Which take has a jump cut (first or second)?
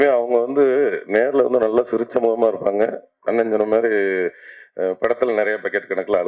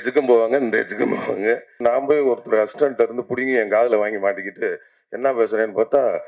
second